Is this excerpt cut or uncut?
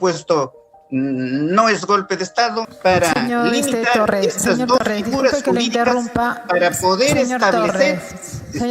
cut